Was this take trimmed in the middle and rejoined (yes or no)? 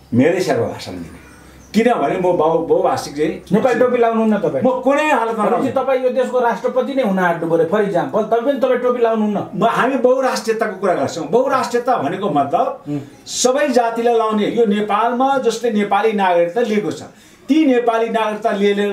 no